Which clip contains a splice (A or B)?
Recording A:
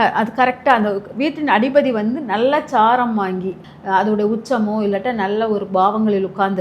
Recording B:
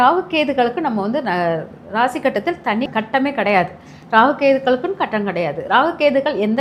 A